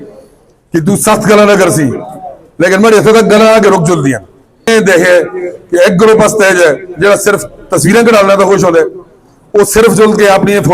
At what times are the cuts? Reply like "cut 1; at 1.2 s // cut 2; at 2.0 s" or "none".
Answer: cut 1; at 4.7 s